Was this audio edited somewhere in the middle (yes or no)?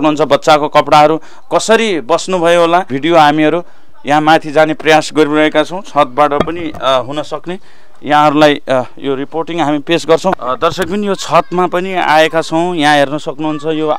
no